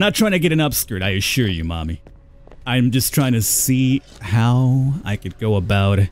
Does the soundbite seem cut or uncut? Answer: uncut